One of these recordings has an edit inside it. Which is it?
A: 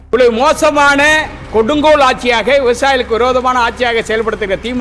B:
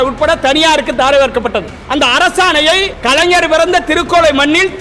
B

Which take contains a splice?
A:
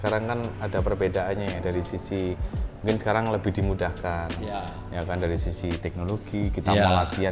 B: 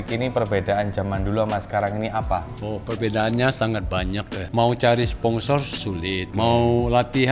B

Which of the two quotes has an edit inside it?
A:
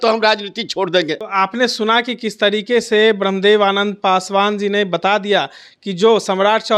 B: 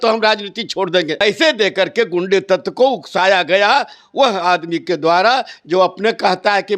B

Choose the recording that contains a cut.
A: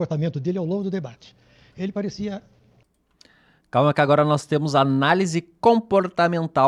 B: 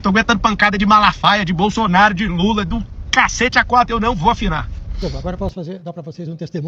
B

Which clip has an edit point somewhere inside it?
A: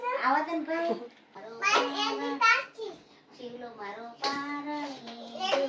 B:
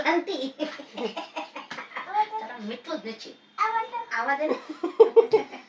A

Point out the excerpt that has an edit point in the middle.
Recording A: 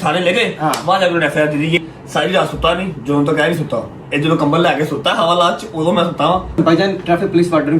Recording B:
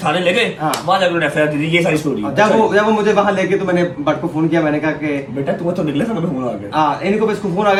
A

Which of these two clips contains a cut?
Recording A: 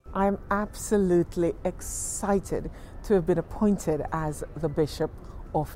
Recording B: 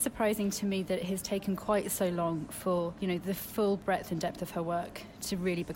B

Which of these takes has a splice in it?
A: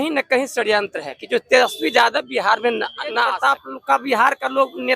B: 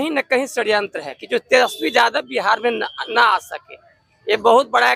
A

